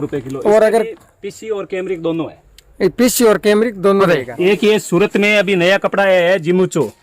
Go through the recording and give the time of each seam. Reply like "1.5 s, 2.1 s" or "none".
4.0 s